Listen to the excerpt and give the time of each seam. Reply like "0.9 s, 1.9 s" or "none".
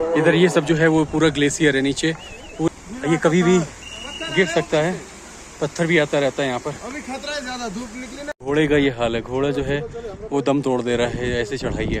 2.7 s, 8.3 s